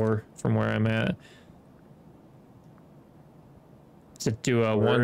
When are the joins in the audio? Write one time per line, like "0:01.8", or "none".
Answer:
none